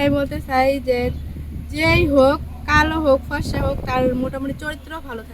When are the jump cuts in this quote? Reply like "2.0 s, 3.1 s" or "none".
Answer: none